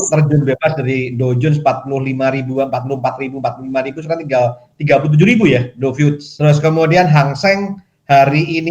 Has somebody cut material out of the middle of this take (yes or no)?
yes